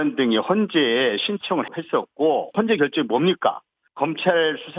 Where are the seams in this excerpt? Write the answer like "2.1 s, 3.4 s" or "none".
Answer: 2.5 s